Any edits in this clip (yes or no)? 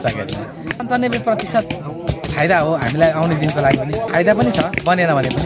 yes